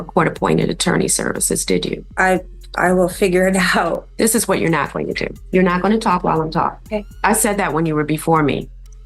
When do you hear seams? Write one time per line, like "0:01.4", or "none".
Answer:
0:02.1
0:04.1
0:06.8